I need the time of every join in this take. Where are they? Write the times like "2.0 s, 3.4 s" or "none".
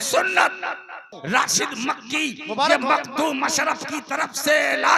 1.1 s